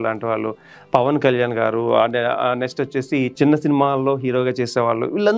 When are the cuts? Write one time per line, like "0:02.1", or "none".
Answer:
0:03.3